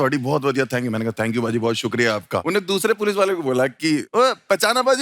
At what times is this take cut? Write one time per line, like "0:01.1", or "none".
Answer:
0:02.4
0:04.1